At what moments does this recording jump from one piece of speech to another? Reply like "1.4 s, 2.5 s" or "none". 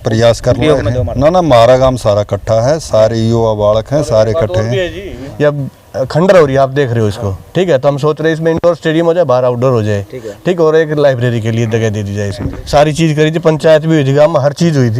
1.0 s, 5.2 s, 12.5 s